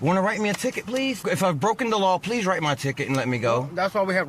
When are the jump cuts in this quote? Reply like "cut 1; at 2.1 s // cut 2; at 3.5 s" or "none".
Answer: cut 1; at 1.2 s